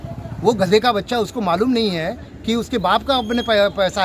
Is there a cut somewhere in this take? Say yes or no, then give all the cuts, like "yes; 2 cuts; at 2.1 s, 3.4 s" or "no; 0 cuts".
no; 0 cuts